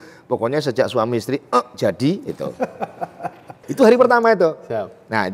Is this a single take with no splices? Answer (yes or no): no